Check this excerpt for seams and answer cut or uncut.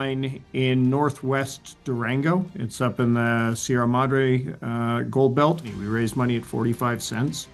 cut